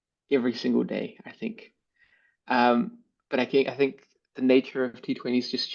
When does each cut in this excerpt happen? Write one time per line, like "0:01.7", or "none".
none